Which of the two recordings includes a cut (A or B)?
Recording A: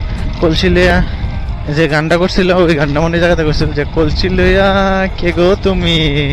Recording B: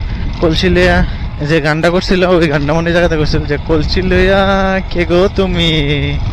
B